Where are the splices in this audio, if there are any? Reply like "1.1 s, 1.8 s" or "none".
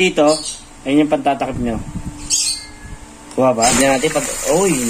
3.5 s